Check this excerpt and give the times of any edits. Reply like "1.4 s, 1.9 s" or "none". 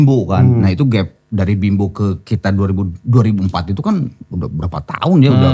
none